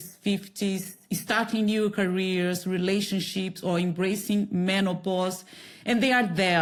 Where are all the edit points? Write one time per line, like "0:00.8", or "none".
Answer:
none